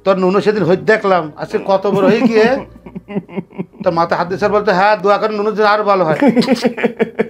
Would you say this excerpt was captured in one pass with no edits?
yes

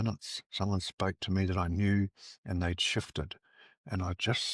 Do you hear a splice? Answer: no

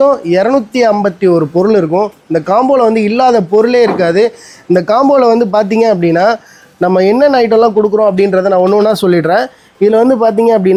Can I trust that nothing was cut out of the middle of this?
yes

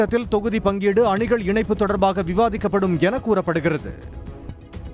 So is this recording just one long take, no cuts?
no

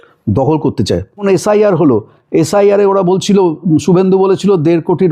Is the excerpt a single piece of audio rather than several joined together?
no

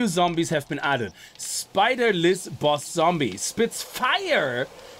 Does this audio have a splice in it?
yes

